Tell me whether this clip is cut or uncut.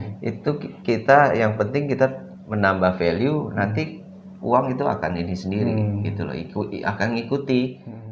uncut